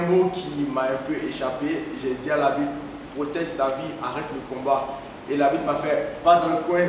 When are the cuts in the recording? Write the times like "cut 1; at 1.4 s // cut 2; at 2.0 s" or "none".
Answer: none